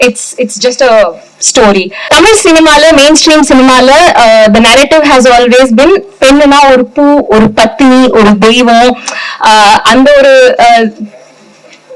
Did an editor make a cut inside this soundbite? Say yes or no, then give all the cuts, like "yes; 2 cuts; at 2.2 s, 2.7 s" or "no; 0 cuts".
yes; 1 cut; at 2.1 s